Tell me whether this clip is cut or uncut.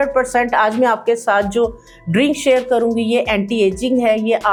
uncut